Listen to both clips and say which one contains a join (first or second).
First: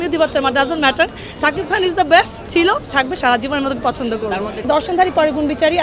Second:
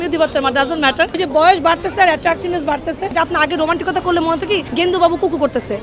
second